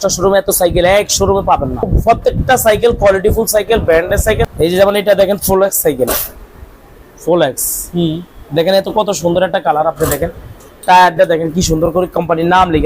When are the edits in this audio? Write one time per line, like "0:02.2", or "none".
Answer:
0:01.9
0:04.4

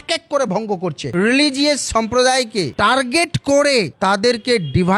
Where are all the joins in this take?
0:01.1

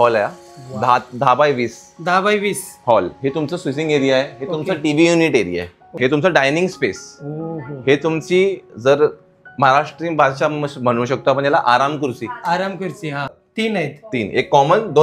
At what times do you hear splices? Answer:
0:05.9
0:13.3

